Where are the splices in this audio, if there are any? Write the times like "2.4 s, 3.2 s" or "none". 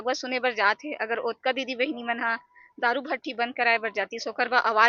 none